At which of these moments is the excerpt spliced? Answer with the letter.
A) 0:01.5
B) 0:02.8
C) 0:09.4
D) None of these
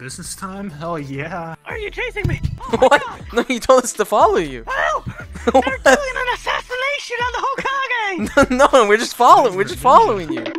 A